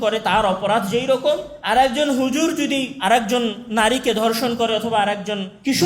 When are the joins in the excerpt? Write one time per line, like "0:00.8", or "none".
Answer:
0:01.5
0:02.9